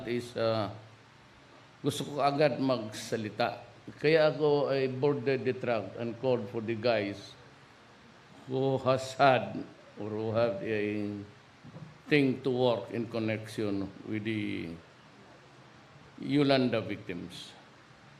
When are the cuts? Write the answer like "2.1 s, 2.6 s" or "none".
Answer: 1.4 s